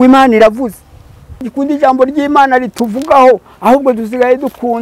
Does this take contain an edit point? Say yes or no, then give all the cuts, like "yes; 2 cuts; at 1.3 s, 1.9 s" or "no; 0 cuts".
yes; 1 cut; at 1.4 s